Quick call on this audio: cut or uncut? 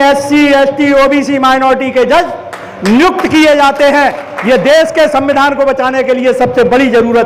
uncut